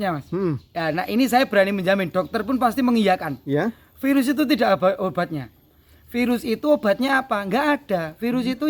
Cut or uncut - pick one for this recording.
uncut